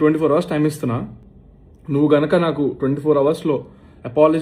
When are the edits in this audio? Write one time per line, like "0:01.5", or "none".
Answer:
0:01.5